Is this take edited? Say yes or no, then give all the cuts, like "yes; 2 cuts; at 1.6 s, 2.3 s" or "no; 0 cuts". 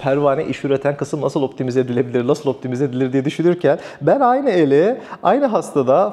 no; 0 cuts